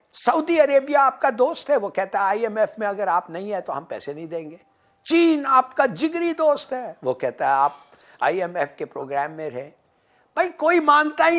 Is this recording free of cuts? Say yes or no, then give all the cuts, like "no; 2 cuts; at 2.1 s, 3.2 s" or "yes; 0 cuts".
yes; 0 cuts